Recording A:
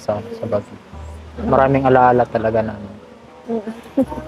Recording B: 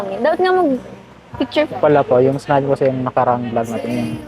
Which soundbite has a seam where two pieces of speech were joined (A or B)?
B